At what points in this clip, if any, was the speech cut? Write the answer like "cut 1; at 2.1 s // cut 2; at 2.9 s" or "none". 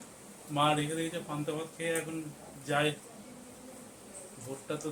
none